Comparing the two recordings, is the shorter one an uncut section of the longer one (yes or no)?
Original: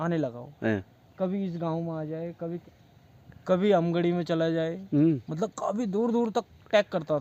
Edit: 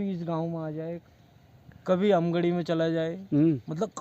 no